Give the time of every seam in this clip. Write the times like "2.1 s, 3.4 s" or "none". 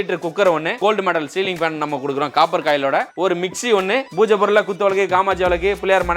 0.8 s, 3.1 s, 4.1 s